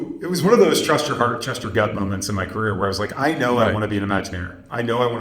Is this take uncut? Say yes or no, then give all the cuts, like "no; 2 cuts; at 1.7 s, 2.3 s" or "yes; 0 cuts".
yes; 0 cuts